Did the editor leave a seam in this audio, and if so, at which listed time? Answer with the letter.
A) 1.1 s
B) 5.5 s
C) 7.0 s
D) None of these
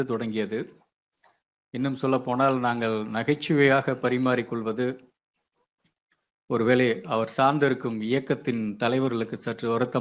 D